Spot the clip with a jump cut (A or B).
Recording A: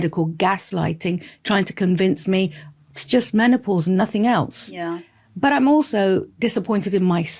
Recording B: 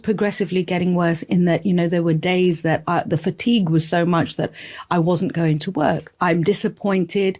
B